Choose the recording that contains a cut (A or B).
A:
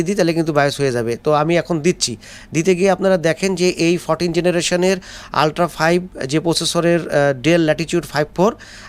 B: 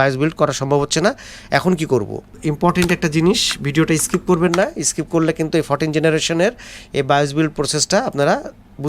B